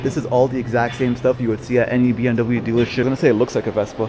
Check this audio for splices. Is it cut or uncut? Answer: cut